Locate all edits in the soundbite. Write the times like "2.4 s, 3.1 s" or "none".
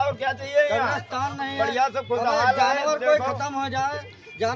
none